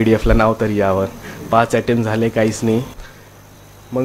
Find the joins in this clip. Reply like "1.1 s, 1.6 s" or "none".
3.0 s